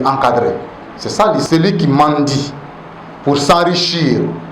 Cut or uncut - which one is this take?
cut